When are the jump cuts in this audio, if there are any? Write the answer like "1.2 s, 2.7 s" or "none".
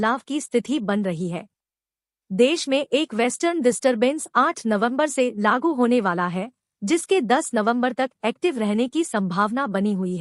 none

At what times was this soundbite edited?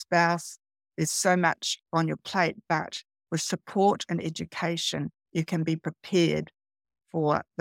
none

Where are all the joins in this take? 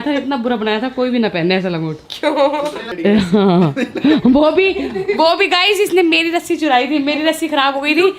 none

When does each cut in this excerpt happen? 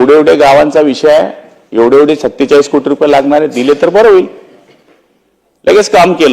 none

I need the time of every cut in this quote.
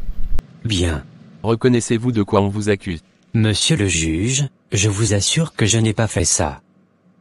1.3 s

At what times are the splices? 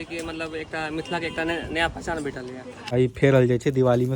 2.8 s

